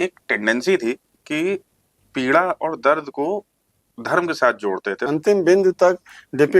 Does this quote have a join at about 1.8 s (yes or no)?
no